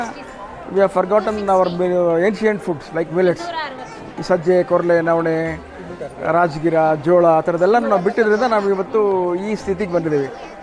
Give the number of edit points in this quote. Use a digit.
0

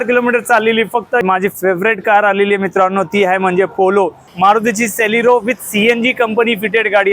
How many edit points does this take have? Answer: 2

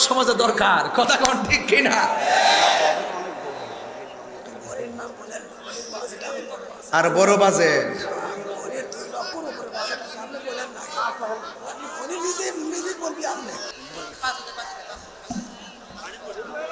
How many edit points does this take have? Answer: 1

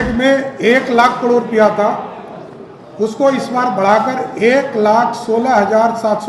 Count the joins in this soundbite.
0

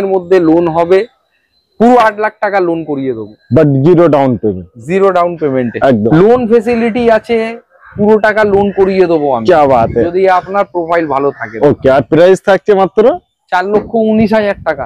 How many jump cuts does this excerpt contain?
1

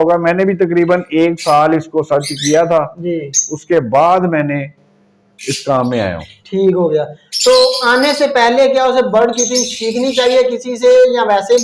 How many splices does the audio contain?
0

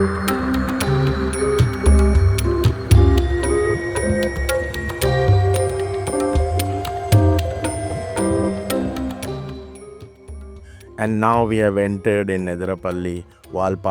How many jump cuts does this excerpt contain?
0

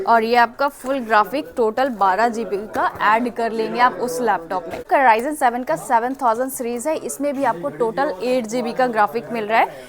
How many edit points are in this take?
1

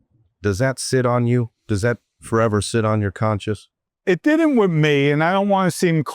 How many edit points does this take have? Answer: 1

